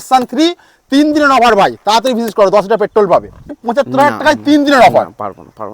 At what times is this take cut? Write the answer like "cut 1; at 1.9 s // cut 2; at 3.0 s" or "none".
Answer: cut 1; at 3.5 s